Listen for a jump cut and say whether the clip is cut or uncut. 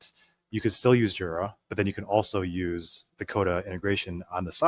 cut